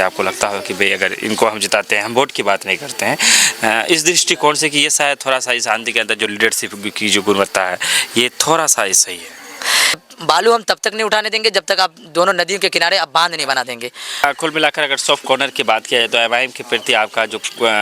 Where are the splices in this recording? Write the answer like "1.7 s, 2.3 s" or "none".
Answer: 10.1 s, 14.2 s